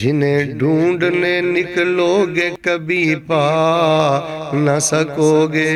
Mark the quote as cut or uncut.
uncut